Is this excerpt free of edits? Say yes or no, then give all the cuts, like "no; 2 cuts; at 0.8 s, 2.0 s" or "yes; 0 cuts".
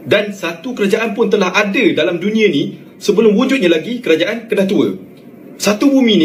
yes; 0 cuts